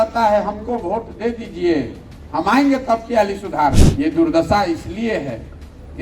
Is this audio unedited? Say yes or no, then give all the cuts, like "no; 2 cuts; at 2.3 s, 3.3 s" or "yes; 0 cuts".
no; 1 cut; at 3.8 s